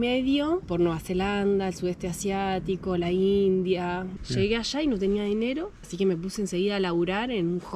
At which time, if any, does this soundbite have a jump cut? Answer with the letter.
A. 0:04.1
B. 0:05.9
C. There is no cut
A